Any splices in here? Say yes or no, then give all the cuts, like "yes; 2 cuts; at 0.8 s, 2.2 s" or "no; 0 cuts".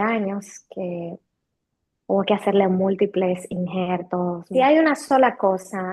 yes; 1 cut; at 4.4 s